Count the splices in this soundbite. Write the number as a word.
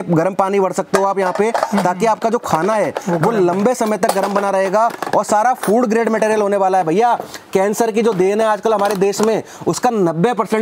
zero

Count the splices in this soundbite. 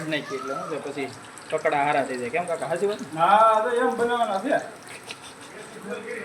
zero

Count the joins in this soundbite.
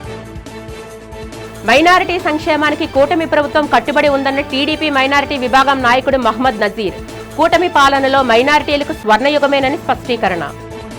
one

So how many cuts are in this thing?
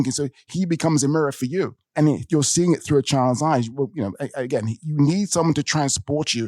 one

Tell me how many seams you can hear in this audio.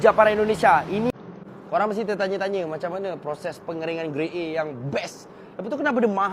one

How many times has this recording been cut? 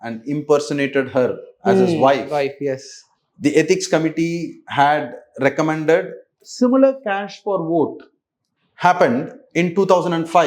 one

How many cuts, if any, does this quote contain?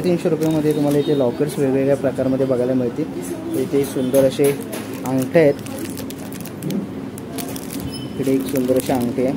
zero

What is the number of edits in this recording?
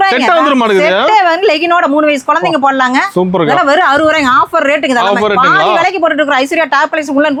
zero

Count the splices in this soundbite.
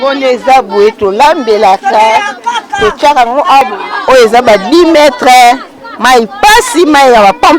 one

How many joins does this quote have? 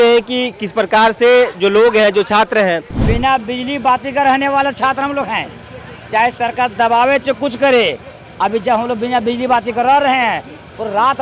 one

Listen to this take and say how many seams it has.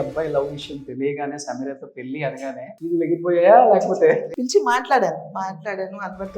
two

